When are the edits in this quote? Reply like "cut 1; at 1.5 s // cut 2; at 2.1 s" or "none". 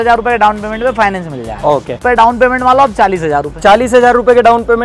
cut 1; at 1.9 s